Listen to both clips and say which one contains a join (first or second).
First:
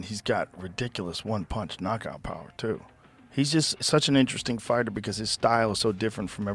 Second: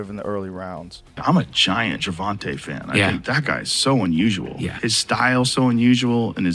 second